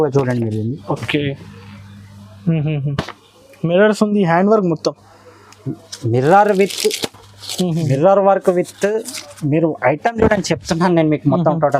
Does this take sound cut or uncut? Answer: uncut